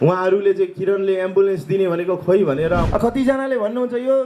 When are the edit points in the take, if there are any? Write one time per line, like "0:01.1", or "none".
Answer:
0:02.8